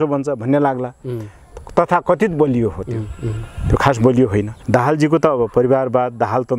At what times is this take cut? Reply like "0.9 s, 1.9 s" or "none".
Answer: 4.6 s